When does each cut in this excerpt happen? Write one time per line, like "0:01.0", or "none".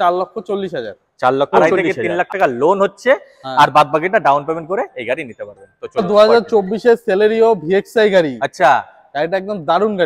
none